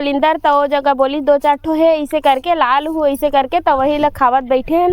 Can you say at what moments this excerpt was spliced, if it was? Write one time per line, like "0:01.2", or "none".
none